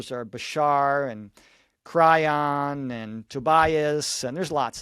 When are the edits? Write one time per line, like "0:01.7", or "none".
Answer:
none